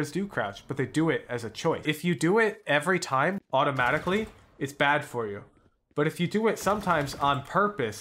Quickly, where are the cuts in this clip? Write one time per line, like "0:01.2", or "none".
0:01.8

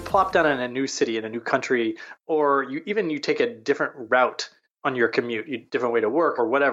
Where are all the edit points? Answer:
none

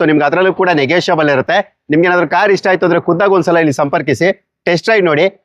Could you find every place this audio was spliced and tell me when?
none

